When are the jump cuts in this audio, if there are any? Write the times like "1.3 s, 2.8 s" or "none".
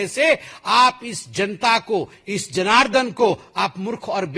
none